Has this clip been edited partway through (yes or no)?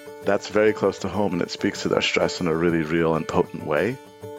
yes